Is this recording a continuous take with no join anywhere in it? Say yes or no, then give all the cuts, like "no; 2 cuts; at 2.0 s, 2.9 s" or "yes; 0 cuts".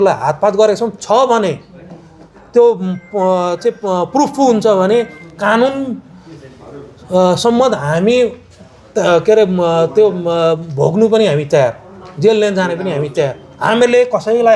yes; 0 cuts